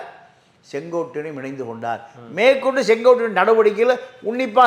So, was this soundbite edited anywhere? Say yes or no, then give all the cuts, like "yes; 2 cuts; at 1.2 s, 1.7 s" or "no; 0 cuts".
no; 0 cuts